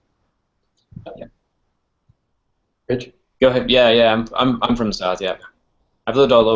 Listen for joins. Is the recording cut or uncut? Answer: uncut